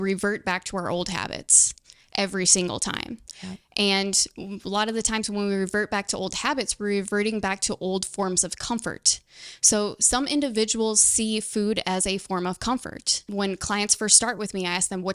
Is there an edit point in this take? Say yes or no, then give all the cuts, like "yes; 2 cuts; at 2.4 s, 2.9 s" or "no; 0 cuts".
yes; 1 cut; at 13.3 s